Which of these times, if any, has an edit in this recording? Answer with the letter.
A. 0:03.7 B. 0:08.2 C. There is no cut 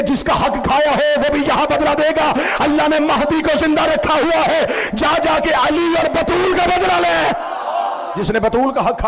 B